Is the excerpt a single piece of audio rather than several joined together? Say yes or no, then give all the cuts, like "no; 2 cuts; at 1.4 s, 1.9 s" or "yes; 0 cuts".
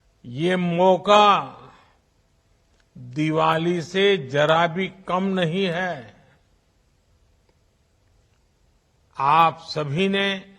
yes; 0 cuts